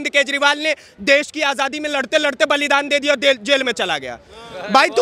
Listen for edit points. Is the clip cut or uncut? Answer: uncut